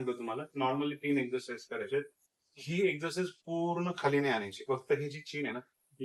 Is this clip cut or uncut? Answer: uncut